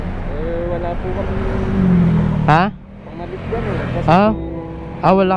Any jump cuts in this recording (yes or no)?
no